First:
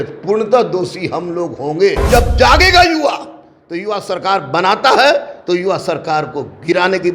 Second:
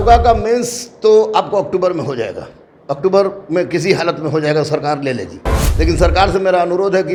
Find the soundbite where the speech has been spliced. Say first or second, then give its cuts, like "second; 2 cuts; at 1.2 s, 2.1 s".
first; 1 cut; at 2.0 s